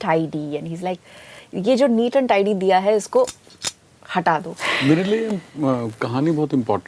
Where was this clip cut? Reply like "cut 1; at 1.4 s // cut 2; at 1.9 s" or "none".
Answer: cut 1; at 4.5 s

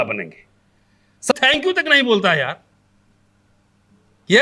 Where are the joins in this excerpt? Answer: cut 1; at 1.3 s

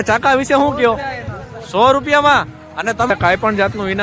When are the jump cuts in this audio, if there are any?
cut 1; at 3.1 s

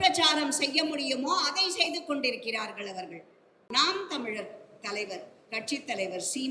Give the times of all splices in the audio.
cut 1; at 3.7 s

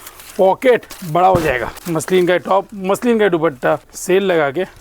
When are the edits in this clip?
cut 1; at 1.8 s // cut 2; at 3.9 s

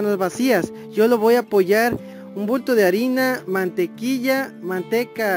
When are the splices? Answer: none

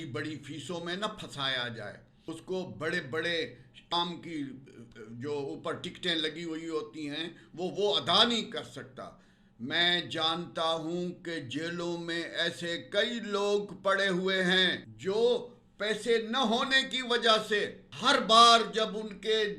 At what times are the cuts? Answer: cut 1; at 2.1 s // cut 2; at 3.9 s // cut 3; at 14.9 s // cut 4; at 17.8 s

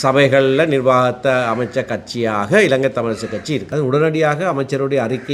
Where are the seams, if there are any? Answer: cut 1; at 3.7 s

